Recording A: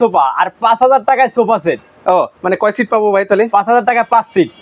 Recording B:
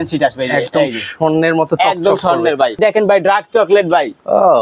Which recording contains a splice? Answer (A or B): B